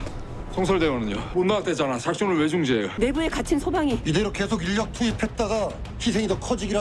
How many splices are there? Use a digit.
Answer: 2